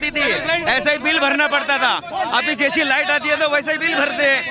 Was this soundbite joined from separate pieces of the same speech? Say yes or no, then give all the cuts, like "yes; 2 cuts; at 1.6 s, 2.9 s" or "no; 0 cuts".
no; 0 cuts